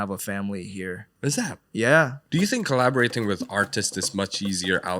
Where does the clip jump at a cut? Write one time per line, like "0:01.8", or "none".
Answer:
0:01.1
0:02.2